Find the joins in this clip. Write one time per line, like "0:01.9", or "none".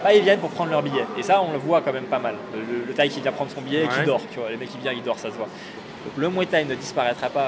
0:05.8